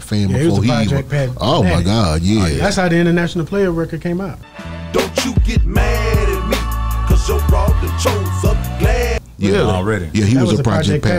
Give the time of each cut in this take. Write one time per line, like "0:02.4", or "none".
none